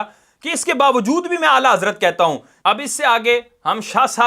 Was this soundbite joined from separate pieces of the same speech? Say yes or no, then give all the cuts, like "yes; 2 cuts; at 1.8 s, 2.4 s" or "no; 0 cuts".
yes; 1 cut; at 2.5 s